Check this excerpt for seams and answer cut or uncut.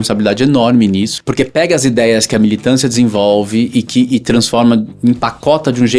cut